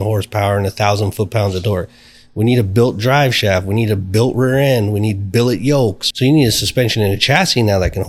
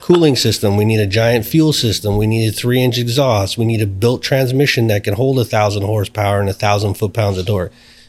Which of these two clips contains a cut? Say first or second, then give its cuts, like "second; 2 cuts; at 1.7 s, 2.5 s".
first; 1 cut; at 6.0 s